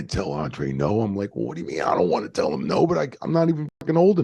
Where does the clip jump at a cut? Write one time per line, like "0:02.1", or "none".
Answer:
none